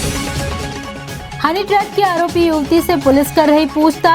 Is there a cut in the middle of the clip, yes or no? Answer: yes